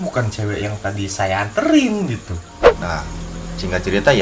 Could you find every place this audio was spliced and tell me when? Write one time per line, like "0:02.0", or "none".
0:02.7